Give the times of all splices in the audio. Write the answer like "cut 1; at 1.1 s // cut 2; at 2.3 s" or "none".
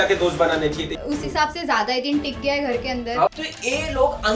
cut 1; at 0.9 s // cut 2; at 3.3 s